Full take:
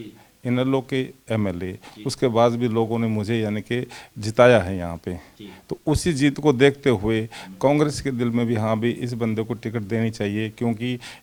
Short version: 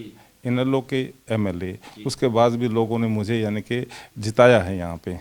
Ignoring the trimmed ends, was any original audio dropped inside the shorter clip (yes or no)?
no